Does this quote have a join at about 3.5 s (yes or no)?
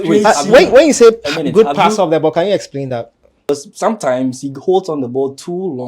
yes